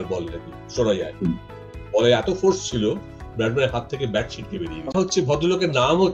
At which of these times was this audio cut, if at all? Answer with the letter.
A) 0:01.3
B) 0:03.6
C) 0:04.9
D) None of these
C